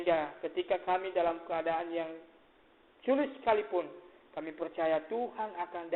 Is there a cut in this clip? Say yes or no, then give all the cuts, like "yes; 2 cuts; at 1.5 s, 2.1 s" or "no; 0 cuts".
no; 0 cuts